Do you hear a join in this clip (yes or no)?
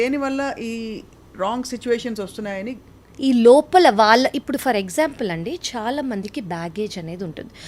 no